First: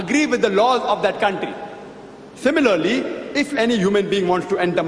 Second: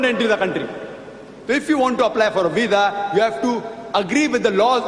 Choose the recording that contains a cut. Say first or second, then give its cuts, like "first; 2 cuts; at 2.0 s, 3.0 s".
second; 1 cut; at 2.3 s